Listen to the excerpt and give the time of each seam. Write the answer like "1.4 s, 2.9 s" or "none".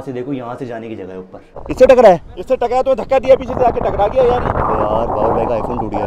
1.6 s